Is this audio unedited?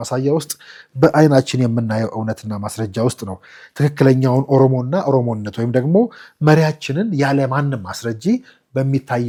yes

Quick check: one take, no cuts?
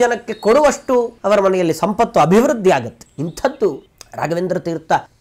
no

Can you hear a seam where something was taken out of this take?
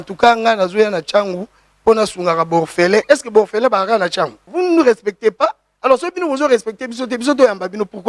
yes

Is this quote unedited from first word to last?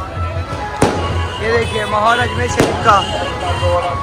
yes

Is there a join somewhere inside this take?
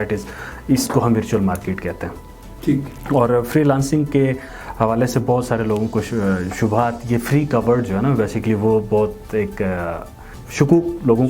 no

